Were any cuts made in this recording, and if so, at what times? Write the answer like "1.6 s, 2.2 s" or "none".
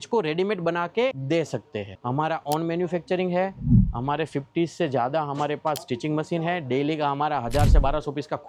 none

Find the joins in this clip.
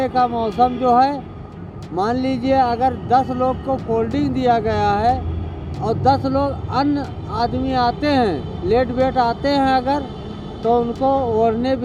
none

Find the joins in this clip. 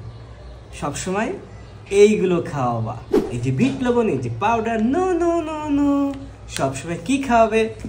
3.3 s

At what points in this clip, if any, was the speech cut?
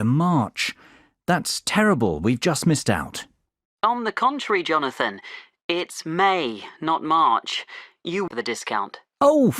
8.3 s

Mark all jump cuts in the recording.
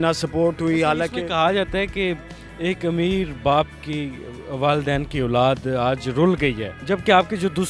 none

